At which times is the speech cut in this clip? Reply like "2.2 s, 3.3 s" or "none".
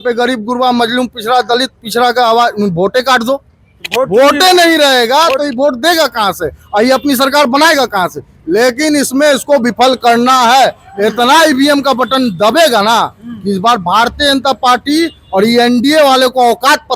none